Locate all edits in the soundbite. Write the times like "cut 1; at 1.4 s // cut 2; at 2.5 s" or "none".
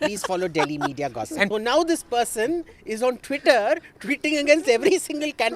cut 1; at 1.5 s